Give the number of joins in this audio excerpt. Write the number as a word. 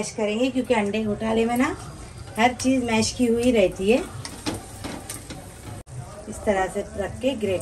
one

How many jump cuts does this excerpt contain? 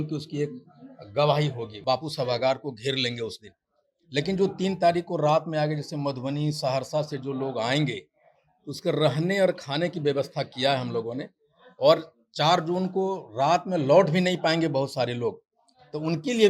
one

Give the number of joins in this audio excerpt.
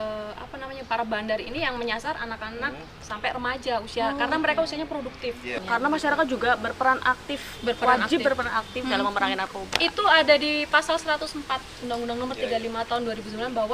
one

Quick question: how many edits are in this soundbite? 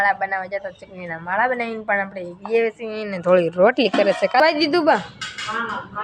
one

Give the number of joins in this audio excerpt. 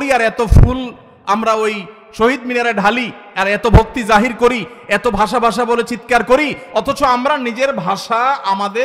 zero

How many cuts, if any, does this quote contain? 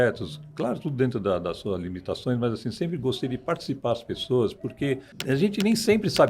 one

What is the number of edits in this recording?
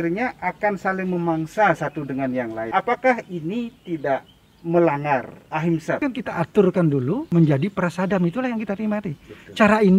three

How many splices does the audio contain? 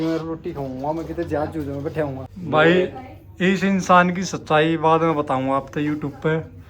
one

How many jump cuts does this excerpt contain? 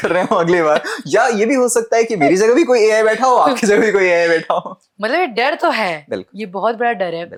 zero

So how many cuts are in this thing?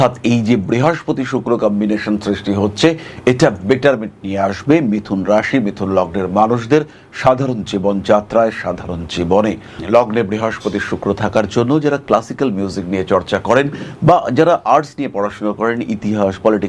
one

